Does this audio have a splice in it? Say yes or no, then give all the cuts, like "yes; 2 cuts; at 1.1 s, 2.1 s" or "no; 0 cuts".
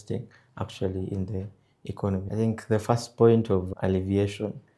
yes; 1 cut; at 2.3 s